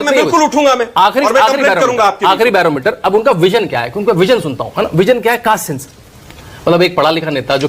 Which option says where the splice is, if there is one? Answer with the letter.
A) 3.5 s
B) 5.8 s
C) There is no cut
C